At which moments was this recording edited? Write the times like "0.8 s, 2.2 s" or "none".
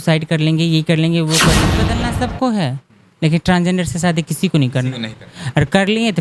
1.7 s